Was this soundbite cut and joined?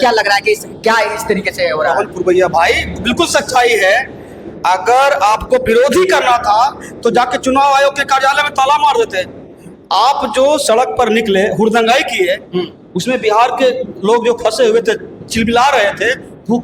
no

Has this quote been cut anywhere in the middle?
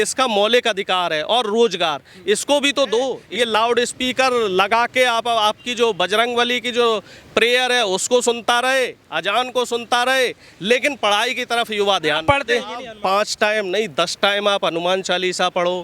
yes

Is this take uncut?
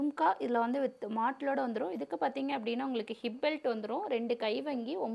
yes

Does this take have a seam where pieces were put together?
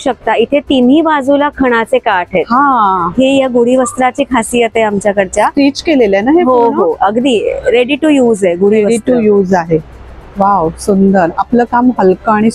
no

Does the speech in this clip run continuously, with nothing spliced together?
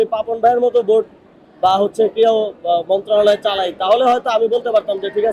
yes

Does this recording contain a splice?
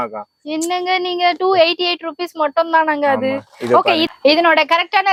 no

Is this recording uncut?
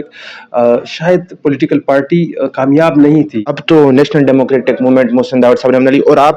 no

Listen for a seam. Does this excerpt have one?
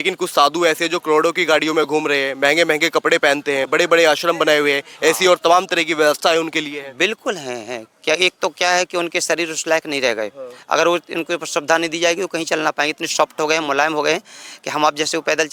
no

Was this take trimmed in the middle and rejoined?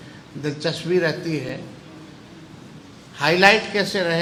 no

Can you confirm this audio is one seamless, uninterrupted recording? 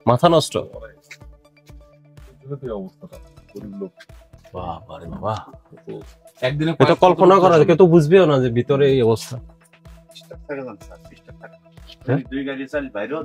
yes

